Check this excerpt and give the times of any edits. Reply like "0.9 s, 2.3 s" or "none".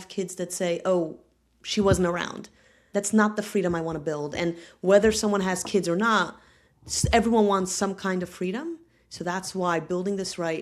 none